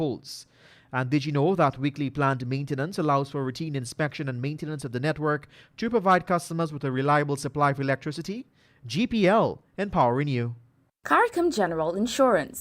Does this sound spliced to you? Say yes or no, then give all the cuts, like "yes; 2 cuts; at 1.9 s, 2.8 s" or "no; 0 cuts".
yes; 1 cut; at 11.1 s